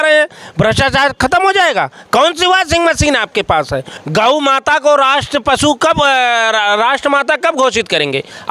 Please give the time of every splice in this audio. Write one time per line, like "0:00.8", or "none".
0:03.9